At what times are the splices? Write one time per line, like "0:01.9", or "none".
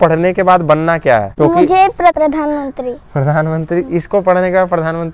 0:01.3
0:02.1